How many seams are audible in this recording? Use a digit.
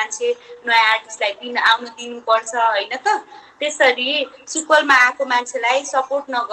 0